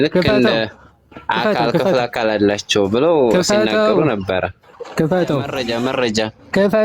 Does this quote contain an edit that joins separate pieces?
yes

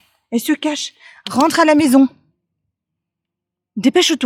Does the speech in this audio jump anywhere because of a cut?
no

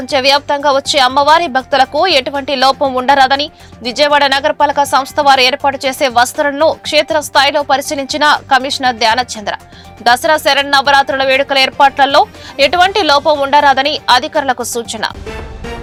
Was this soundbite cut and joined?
no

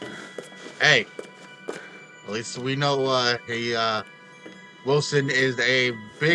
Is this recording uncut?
yes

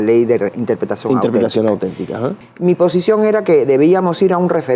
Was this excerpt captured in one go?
no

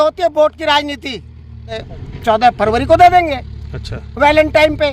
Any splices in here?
yes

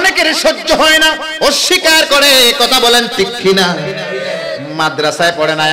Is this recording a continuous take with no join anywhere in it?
no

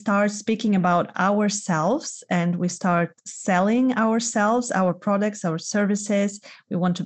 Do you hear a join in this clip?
no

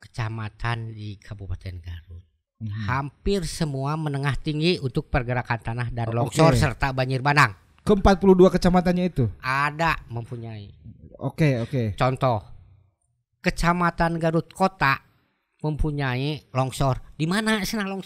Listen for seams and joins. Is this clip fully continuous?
yes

